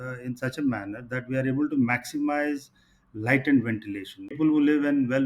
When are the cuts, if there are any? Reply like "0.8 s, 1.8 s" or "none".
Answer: 4.2 s